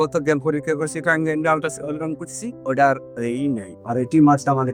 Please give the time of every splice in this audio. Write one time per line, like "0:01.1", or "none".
none